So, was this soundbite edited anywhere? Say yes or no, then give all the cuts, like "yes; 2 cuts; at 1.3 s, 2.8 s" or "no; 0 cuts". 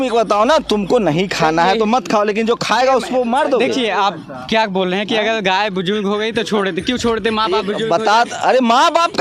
no; 0 cuts